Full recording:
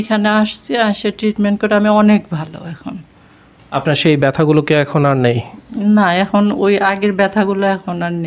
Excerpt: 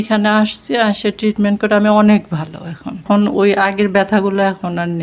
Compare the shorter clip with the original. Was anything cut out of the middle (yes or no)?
yes